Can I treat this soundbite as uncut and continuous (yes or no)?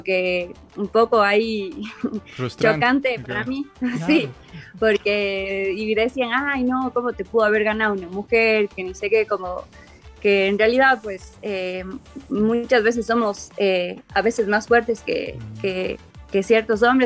no